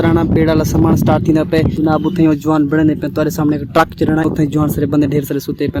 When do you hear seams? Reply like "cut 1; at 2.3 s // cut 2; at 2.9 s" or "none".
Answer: cut 1; at 1.8 s // cut 2; at 4.3 s